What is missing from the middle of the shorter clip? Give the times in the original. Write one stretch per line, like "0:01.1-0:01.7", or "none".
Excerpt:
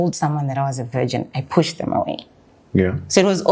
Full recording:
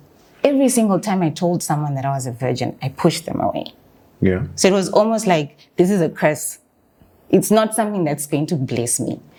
none